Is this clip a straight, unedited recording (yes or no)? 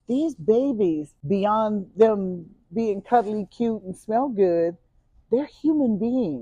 no